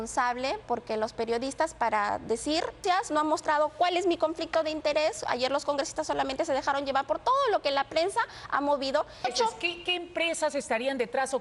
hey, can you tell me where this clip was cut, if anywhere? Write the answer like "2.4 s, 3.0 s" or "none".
2.8 s, 9.3 s